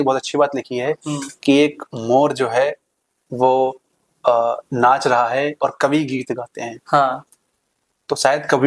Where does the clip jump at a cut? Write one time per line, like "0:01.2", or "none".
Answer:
none